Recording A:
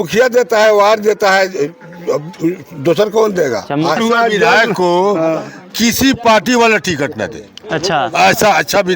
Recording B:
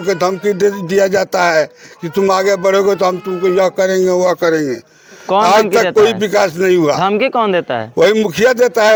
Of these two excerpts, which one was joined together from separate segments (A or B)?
A